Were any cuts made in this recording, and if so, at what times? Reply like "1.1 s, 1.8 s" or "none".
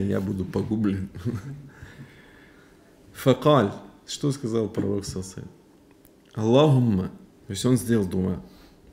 none